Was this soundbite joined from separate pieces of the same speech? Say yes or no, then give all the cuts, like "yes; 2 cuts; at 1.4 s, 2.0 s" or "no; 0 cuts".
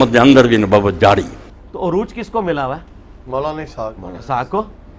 yes; 1 cut; at 1.4 s